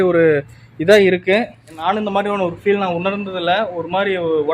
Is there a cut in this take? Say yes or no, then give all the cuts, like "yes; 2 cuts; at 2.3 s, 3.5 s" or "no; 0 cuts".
yes; 1 cut; at 1.8 s